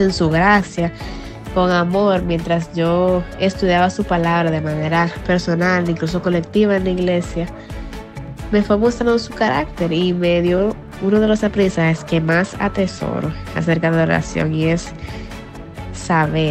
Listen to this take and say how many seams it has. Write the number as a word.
zero